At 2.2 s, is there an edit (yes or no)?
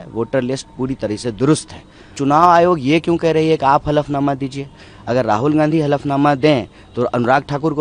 yes